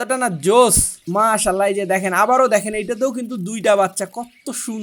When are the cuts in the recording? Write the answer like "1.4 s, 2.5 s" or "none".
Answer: 0.9 s